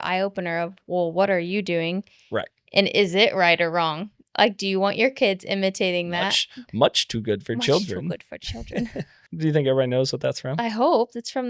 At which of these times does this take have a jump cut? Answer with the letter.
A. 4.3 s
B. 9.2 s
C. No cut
B